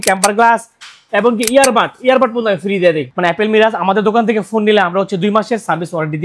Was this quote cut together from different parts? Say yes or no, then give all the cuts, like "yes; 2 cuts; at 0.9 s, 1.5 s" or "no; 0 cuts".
yes; 1 cut; at 3.1 s